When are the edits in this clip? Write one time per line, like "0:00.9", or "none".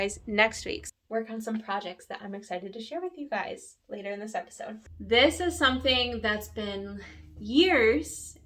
0:00.9
0:04.9